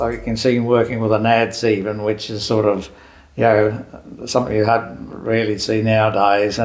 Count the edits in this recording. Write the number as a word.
zero